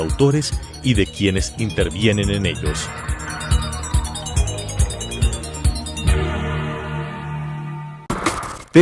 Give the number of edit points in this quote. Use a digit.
0